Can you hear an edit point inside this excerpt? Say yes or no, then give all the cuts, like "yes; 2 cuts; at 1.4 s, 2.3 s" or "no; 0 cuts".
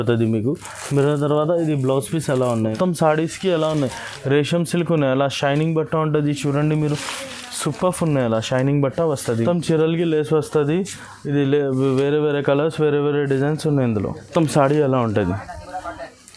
yes; 3 cuts; at 2.6 s, 9.3 s, 14.3 s